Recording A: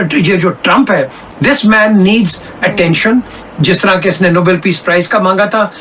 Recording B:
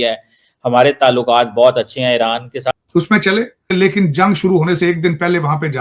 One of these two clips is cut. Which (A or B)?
B